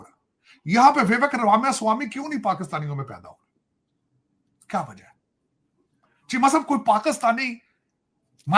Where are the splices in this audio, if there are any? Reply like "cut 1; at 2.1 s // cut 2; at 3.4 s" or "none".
none